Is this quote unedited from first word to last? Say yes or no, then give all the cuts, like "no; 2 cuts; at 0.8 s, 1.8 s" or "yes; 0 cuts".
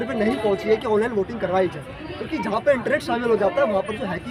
yes; 0 cuts